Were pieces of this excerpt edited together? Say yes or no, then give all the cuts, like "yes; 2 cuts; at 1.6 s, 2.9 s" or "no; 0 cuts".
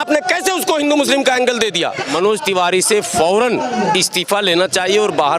yes; 1 cut; at 2.0 s